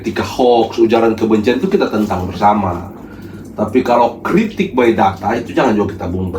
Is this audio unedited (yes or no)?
yes